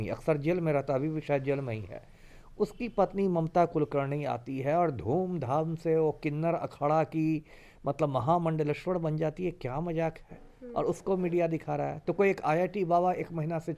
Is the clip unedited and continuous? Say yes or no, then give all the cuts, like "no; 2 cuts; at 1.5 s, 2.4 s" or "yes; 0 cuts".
yes; 0 cuts